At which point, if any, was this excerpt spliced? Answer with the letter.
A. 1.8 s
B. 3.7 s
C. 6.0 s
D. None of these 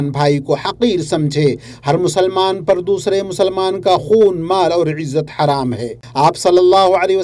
C